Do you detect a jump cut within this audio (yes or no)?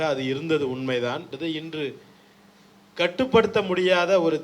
yes